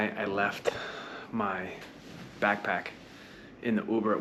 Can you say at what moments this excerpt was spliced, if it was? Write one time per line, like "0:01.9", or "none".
none